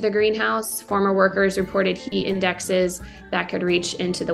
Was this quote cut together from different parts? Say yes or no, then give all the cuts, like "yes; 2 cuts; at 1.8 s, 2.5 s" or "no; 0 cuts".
no; 0 cuts